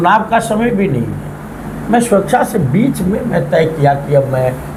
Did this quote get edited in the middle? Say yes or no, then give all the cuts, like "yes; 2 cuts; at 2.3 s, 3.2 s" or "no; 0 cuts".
no; 0 cuts